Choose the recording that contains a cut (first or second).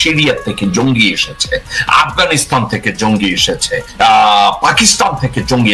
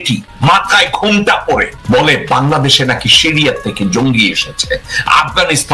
first